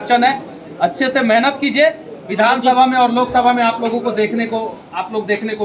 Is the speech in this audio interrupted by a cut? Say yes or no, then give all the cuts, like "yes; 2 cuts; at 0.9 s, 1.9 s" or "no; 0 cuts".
no; 0 cuts